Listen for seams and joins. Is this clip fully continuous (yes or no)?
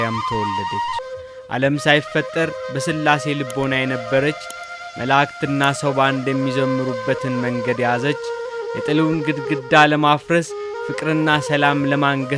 no